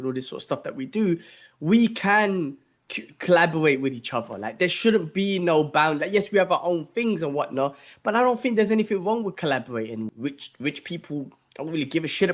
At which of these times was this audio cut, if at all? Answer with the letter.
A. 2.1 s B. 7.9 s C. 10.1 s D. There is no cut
C